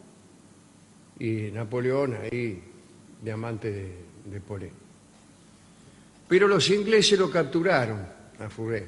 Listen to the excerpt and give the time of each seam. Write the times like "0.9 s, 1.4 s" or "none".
3.1 s